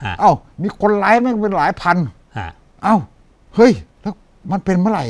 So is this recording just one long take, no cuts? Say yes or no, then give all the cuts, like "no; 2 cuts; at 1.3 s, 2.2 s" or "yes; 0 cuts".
no; 1 cut; at 3.9 s